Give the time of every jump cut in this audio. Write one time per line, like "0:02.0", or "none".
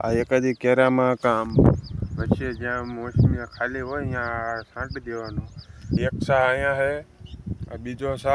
0:06.0